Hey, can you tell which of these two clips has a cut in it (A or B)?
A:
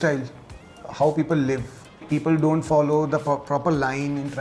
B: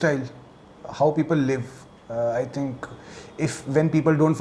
A